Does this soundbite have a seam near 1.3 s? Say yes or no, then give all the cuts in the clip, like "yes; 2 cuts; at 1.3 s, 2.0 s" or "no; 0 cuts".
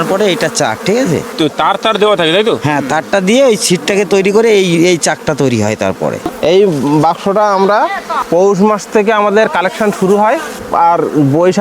yes; 2 cuts; at 1.3 s, 6.3 s